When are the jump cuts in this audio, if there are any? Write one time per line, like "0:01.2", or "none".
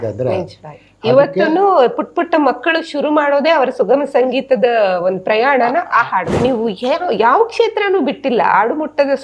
0:06.3